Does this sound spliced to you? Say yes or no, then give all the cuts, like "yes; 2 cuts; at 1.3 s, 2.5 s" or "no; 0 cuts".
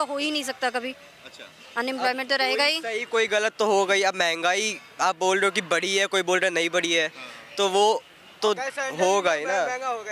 no; 0 cuts